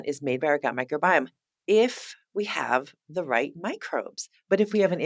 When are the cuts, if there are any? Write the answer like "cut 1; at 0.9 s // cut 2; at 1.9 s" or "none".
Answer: none